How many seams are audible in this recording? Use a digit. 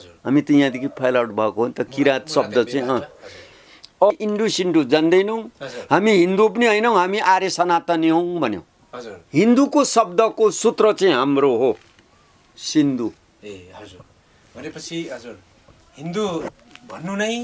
2